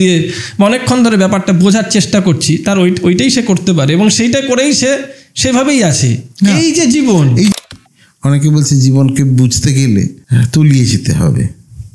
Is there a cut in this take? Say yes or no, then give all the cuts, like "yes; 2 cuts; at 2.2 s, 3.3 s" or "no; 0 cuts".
yes; 2 cuts; at 7.6 s, 10.2 s